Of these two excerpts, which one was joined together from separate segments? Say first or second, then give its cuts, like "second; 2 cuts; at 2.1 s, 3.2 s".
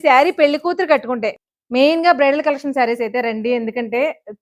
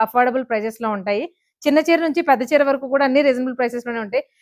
first; 1 cut; at 1.3 s